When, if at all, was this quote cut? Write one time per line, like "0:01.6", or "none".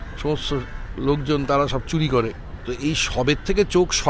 0:02.5